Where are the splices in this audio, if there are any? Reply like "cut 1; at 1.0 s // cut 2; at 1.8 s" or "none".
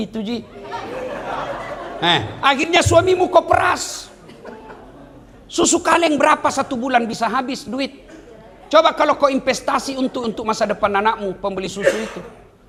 none

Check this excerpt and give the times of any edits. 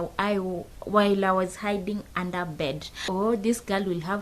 cut 1; at 3.0 s

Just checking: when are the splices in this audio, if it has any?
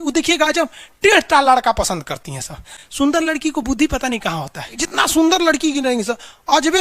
cut 1; at 4.8 s

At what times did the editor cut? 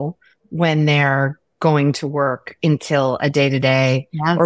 none

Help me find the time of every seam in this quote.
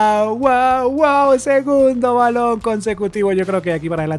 none

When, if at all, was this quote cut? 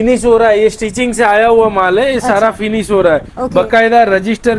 none

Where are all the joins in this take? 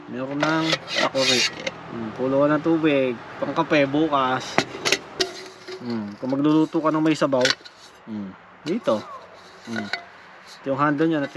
cut 1; at 5.2 s

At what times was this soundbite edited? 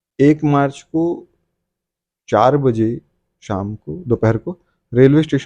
none

